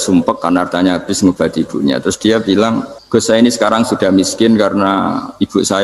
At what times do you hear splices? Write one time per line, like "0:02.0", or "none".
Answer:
0:02.9